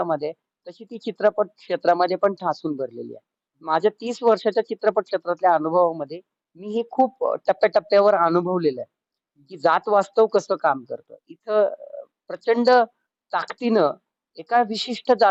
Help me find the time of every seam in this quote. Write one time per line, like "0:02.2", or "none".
none

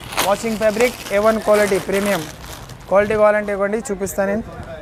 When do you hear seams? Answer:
none

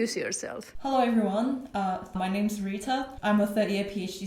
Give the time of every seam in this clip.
0:02.2
0:03.1

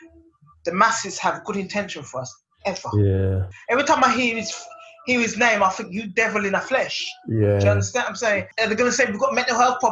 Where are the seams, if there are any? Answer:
0:03.5
0:08.5

